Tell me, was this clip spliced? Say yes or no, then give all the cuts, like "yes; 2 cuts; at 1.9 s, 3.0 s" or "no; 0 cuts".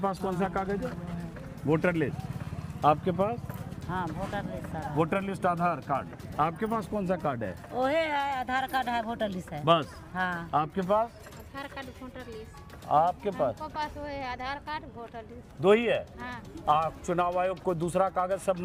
no; 0 cuts